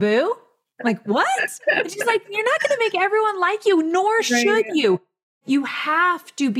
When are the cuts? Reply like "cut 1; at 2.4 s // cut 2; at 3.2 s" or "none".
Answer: cut 1; at 5.2 s